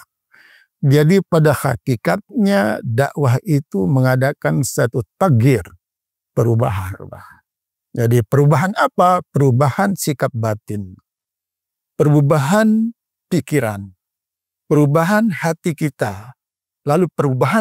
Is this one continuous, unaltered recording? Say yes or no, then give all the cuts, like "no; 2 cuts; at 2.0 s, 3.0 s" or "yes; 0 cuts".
yes; 0 cuts